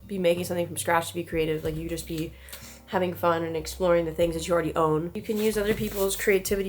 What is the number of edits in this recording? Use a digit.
1